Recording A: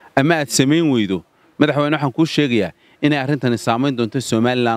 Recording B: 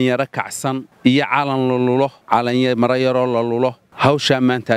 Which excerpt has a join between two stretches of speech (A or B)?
B